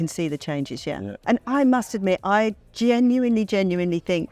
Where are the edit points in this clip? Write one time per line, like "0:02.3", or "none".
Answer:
0:01.1